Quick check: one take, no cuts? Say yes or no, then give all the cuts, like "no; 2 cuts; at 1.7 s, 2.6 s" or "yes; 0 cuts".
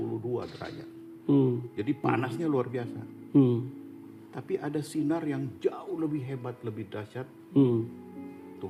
yes; 0 cuts